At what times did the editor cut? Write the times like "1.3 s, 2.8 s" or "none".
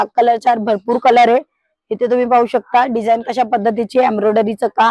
none